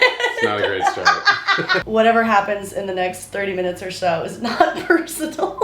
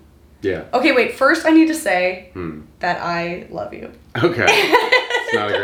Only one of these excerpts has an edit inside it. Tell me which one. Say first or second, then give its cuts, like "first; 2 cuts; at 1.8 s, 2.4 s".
first; 1 cut; at 1.8 s